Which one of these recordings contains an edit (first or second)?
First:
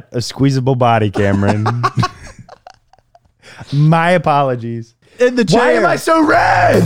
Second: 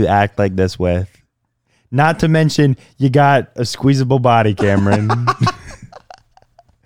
first